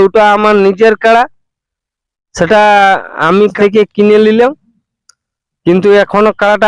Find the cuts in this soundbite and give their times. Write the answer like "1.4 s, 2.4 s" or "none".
3.5 s